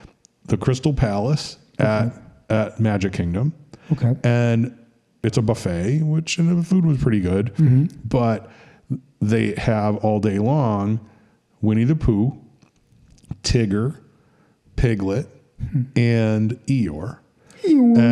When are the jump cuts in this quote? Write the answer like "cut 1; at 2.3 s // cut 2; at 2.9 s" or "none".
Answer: cut 1; at 5.2 s

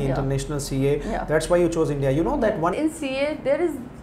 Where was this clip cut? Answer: cut 1; at 2.7 s

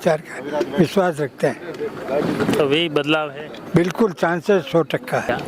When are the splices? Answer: none

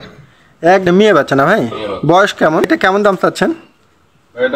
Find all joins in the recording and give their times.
cut 1; at 0.8 s // cut 2; at 2.6 s

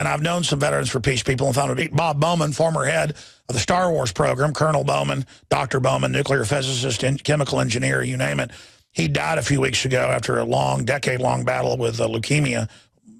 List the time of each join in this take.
none

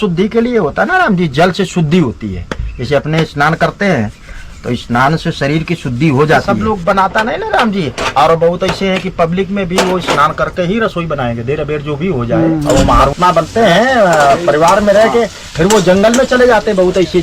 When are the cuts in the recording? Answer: cut 1; at 6.5 s // cut 2; at 12.6 s

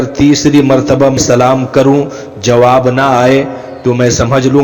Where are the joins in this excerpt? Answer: cut 1; at 1.2 s

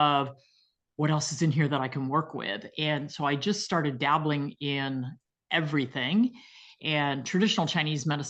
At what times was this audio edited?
none

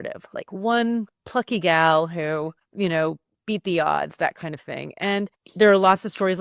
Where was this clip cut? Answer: cut 1; at 1.2 s // cut 2; at 2.6 s // cut 3; at 5.4 s

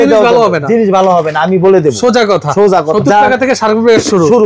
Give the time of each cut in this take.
cut 1; at 2.9 s

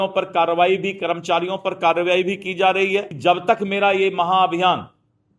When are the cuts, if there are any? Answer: cut 1; at 3.1 s

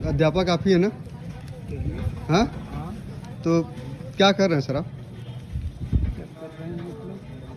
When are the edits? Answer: none

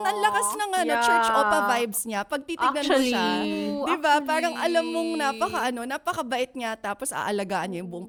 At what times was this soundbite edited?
none

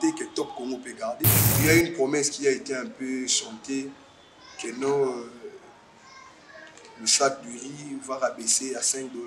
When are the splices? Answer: cut 1; at 1.4 s

